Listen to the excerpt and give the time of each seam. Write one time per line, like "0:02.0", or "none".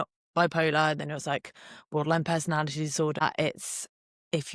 0:03.2

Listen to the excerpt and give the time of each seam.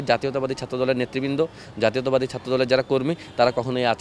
none

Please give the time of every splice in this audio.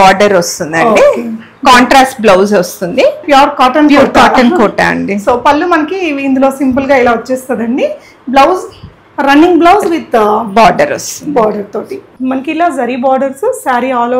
0:03.2
0:12.0

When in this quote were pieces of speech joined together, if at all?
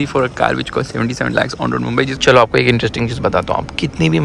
0:02.1

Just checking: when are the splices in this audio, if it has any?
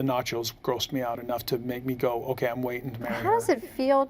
none

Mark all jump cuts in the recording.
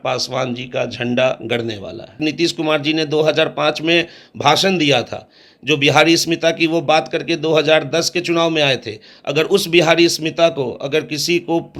0:02.2

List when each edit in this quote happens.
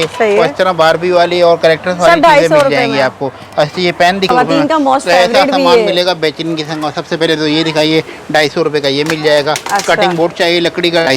0:04.3

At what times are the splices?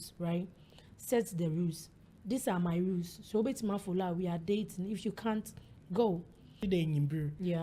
0:06.6

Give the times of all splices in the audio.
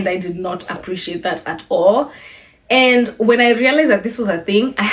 none

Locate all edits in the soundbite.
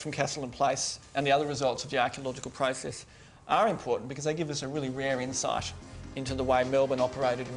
none

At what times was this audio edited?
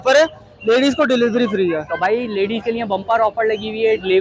none

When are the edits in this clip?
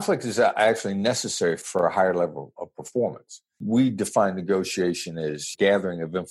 0:01.6
0:03.6
0:05.5

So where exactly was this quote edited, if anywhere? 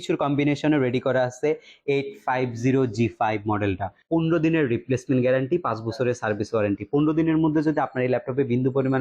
0:03.9

